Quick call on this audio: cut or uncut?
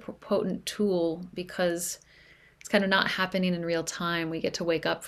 uncut